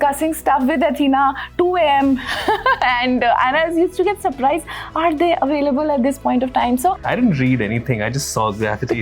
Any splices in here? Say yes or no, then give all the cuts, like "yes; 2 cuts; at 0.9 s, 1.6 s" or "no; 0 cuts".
yes; 1 cut; at 6.9 s